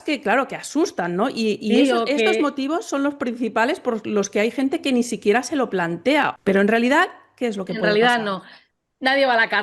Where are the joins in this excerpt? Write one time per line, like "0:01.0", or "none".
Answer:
0:06.3